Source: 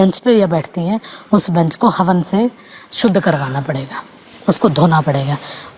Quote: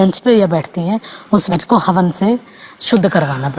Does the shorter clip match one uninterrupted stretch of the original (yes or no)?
no